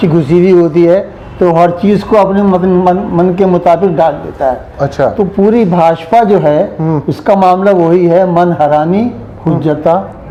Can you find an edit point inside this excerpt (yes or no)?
no